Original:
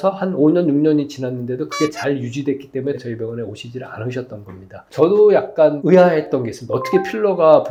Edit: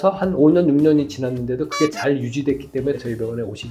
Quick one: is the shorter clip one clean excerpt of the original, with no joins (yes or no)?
yes